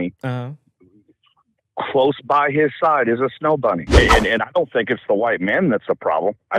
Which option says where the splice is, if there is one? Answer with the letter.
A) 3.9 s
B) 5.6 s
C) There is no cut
A